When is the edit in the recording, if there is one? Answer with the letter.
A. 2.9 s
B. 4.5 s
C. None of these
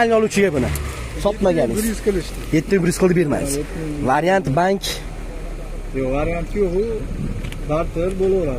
C